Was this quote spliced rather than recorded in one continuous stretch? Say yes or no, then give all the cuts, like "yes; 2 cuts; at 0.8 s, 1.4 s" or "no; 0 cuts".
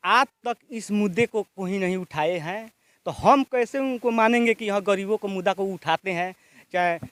no; 0 cuts